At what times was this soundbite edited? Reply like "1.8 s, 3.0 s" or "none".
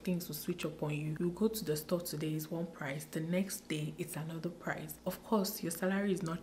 1.1 s, 4.9 s